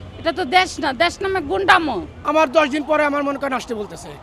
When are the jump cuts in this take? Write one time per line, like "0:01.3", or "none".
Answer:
0:02.1